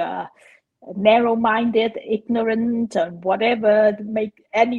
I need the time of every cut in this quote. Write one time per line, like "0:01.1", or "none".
none